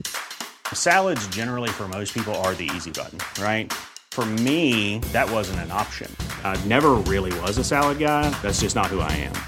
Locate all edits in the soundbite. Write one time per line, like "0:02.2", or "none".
none